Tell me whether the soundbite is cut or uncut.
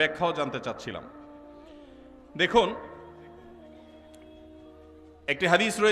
uncut